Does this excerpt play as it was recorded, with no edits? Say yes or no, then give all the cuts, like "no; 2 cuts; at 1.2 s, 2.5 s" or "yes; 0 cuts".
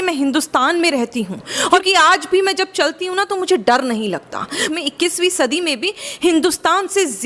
no; 2 cuts; at 1.8 s, 4.6 s